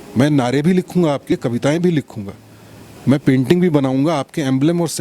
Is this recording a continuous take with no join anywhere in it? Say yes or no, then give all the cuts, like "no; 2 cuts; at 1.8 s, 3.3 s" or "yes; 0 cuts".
no; 1 cut; at 1.3 s